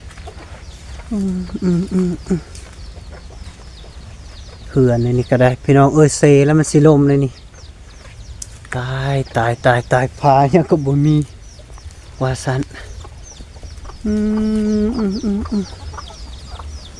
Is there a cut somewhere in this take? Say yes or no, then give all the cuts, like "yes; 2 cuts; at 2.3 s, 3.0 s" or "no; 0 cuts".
no; 0 cuts